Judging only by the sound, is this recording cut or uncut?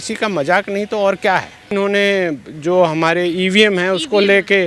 cut